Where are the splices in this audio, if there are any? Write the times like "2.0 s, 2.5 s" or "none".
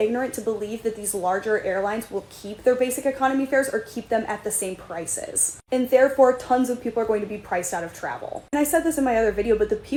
none